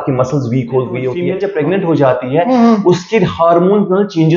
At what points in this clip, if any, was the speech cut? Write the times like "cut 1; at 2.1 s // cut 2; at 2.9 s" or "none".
cut 1; at 1.2 s